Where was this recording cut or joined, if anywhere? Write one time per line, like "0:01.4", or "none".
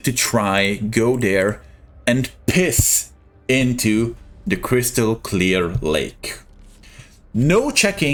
none

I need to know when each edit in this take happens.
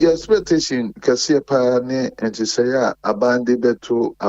0:00.9

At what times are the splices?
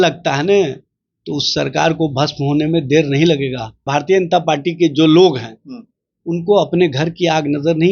0:03.9

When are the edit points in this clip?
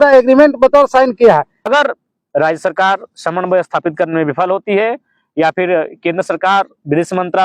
0:01.6

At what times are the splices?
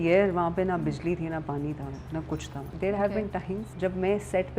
0:02.7
0:03.7

